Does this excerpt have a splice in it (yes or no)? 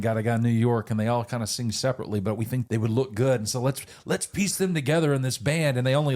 yes